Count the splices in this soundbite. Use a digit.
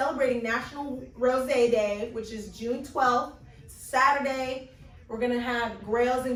0